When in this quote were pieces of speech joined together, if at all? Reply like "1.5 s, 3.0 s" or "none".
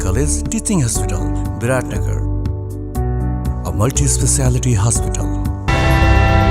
5.6 s

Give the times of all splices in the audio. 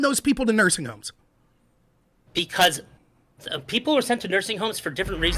none

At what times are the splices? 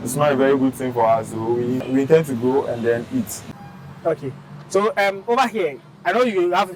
1.8 s, 3.4 s

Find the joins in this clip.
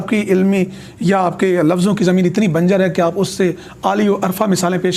none

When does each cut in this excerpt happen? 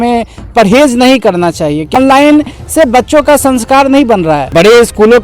1.9 s, 4.5 s

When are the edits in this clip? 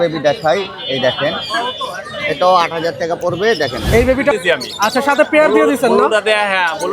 4.3 s

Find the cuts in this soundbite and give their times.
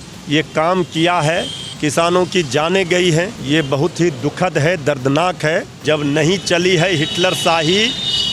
1.6 s, 3.4 s, 5.7 s

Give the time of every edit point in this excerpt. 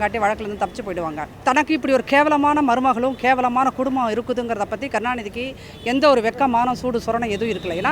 1.3 s

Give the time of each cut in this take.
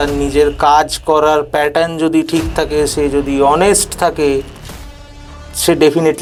none

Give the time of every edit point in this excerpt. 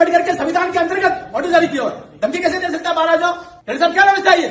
3.6 s

